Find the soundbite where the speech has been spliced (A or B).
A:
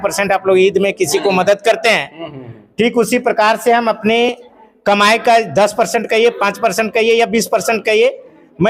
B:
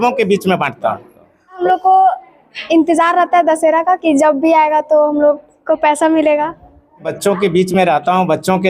B